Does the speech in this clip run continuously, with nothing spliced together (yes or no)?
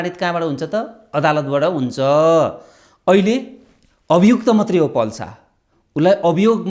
yes